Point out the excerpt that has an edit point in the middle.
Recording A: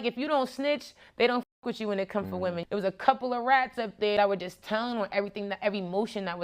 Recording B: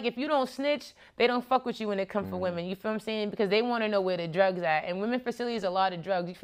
A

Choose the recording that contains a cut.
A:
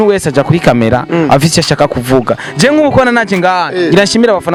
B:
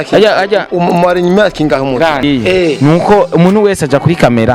B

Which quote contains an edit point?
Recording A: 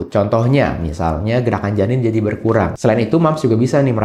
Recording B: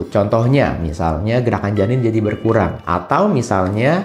A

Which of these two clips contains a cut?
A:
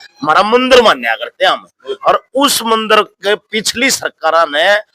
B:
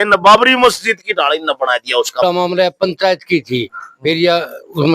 B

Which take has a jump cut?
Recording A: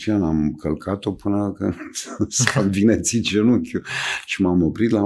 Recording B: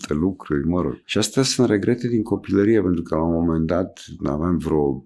B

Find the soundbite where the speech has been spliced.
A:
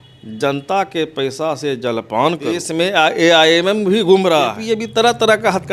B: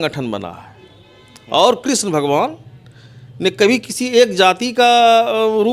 A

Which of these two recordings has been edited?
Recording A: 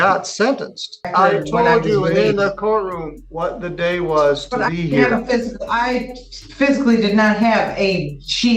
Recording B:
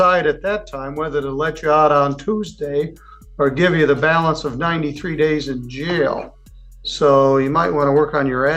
A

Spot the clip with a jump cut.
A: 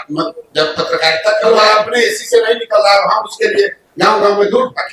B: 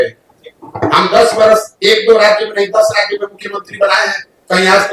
A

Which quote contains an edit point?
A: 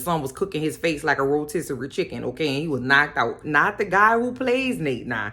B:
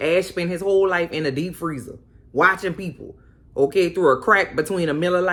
A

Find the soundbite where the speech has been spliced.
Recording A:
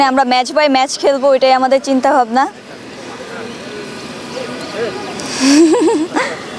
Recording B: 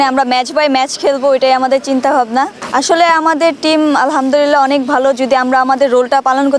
B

